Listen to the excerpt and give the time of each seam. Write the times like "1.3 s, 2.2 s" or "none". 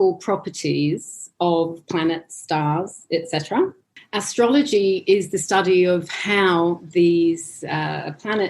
none